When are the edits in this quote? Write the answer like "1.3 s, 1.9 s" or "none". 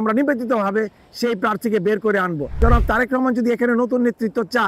2.6 s